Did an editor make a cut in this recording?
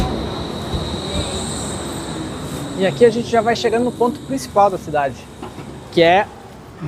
no; 0 cuts

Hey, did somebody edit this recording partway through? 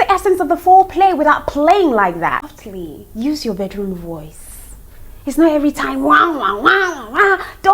yes; 1 cut; at 2.5 s

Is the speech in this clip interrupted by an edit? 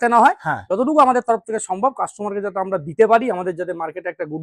no; 0 cuts

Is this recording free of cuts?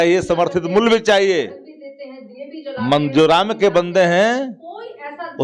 yes; 0 cuts

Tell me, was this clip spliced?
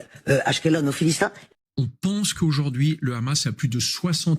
yes; 1 cut; at 1.5 s

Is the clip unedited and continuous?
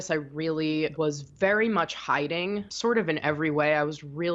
no; 2 cuts; at 1.0 s, 2.7 s

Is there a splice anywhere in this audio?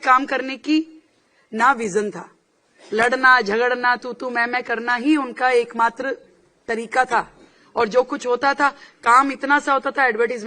no; 0 cuts

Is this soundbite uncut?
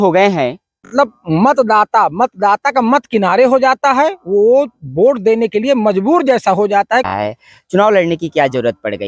no; 2 cuts; at 0.9 s, 7.1 s

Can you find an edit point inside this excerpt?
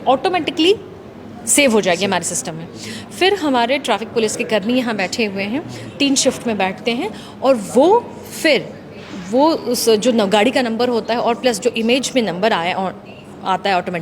no; 0 cuts

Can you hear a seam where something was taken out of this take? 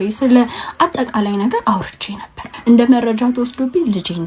yes; 1 cut; at 2.4 s

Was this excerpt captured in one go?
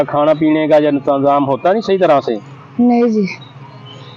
yes; 0 cuts

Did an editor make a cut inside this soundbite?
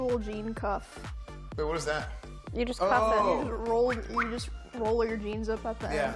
no; 0 cuts

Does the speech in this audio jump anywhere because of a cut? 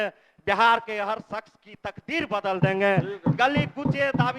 no; 0 cuts

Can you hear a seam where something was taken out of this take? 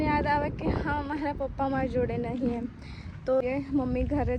yes; 1 cut; at 3.4 s

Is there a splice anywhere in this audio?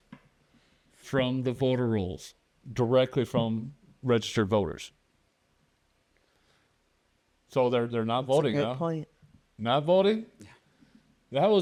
no; 0 cuts

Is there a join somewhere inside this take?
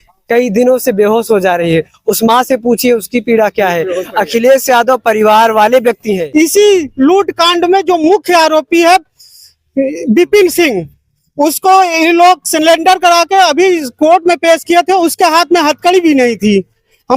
yes; 1 cut; at 6.2 s

